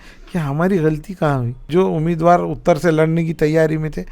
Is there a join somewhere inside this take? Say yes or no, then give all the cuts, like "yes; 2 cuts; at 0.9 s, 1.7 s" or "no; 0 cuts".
yes; 1 cut; at 1.6 s